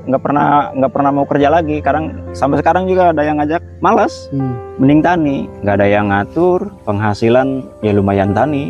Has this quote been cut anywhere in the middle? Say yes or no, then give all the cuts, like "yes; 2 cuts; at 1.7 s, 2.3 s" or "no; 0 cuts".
no; 0 cuts